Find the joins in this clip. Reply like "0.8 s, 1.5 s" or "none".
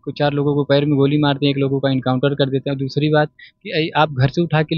none